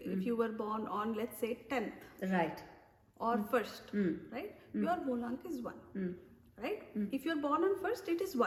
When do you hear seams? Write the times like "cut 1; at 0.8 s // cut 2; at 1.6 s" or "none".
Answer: none